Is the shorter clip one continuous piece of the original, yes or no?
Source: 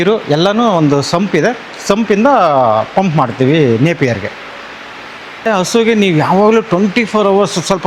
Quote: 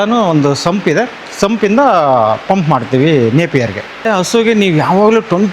no